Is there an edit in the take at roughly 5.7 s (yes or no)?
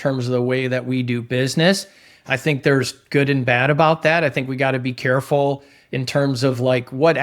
no